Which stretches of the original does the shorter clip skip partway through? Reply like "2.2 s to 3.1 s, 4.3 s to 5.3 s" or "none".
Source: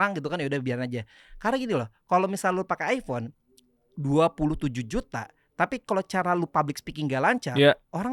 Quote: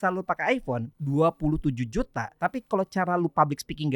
3.3 s to 3.9 s, 5.2 s to 5.4 s